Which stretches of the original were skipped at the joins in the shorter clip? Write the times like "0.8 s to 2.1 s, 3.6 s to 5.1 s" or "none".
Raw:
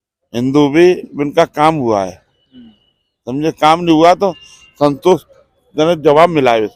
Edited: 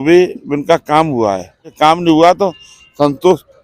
2.4 s to 3.6 s